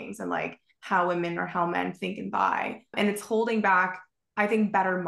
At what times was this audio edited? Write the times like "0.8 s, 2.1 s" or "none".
2.9 s